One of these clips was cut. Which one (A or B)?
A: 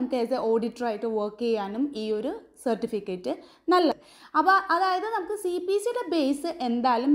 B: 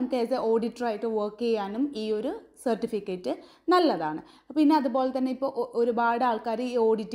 A